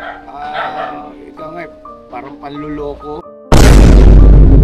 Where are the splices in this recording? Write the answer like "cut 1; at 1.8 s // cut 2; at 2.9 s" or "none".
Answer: cut 1; at 3.3 s